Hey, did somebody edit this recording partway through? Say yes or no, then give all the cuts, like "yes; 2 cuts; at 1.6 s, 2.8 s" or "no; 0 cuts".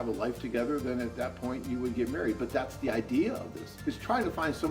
yes; 1 cut; at 3.7 s